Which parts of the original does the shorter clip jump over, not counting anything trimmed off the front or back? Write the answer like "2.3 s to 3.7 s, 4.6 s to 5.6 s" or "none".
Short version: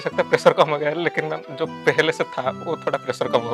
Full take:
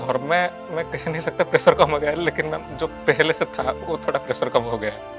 none